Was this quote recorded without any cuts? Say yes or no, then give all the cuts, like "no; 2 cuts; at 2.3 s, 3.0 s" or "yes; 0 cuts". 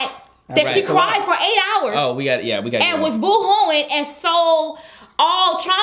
no; 1 cut; at 1.7 s